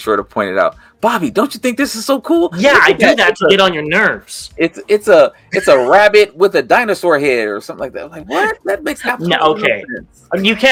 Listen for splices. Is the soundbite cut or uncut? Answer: uncut